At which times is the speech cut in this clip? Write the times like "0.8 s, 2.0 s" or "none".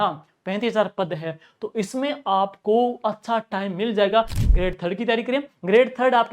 4.4 s